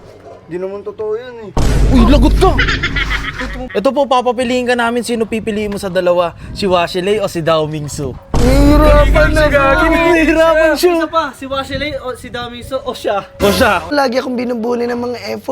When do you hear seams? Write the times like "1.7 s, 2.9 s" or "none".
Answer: 3.6 s, 13.9 s